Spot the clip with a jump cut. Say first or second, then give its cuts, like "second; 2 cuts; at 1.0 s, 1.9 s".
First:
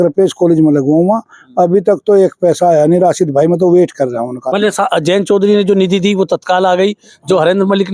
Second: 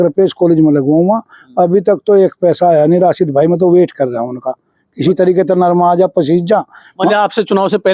first; 1 cut; at 4.4 s